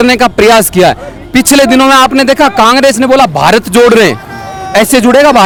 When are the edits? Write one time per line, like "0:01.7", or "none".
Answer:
none